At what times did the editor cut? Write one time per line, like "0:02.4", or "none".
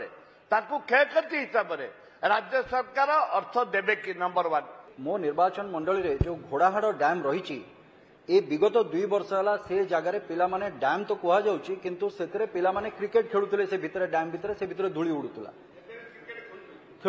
0:04.9